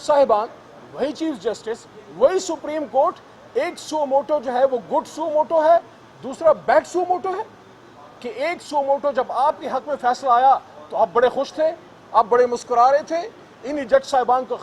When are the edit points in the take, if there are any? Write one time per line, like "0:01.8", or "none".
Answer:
none